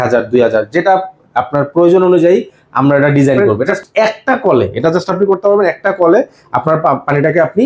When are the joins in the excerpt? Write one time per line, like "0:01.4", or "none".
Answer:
0:03.7